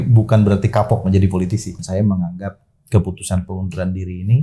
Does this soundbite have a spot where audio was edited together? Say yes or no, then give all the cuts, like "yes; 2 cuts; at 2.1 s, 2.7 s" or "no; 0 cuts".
yes; 1 cut; at 1.8 s